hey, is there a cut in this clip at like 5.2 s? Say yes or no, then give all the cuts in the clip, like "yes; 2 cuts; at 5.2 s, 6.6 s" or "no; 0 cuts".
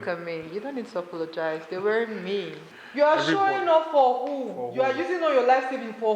no; 1 cut; at 2.6 s